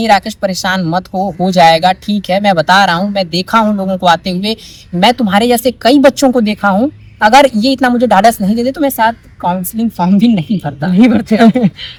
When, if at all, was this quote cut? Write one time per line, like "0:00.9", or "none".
none